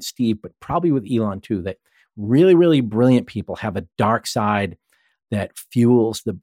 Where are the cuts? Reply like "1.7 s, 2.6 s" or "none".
none